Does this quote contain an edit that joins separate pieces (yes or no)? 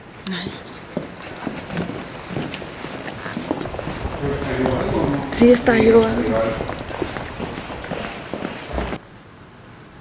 yes